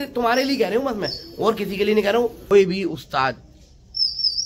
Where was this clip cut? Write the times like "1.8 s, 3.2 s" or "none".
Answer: 2.5 s